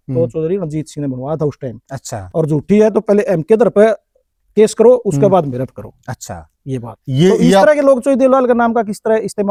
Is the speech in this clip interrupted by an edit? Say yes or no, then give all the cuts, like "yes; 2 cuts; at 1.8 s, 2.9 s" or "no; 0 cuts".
no; 0 cuts